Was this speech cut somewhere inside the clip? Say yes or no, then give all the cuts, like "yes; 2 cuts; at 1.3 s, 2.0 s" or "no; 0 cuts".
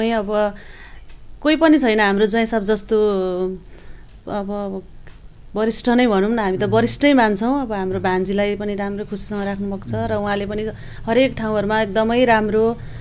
no; 0 cuts